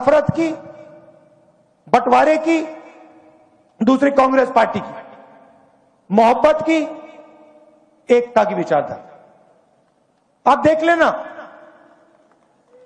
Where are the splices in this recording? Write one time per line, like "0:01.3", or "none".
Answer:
0:02.1